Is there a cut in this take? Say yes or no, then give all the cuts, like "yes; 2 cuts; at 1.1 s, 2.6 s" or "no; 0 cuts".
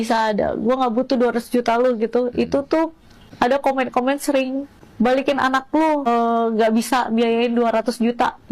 yes; 3 cuts; at 3.3 s, 4.7 s, 6.1 s